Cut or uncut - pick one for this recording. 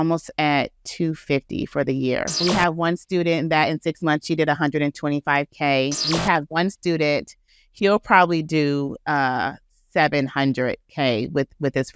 cut